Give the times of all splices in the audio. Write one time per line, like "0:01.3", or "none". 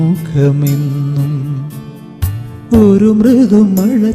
0:02.3